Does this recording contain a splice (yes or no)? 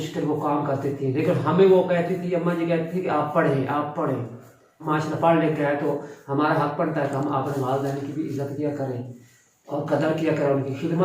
yes